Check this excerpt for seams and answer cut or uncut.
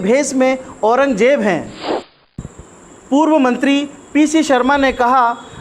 cut